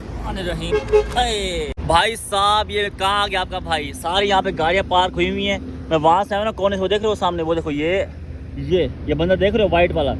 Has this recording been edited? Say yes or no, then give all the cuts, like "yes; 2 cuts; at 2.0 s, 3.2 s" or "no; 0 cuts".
no; 0 cuts